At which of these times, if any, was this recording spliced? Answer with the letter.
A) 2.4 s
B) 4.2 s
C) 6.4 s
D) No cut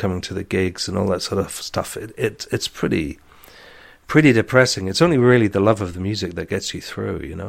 D